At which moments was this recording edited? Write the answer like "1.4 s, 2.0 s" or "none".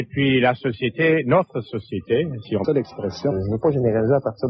none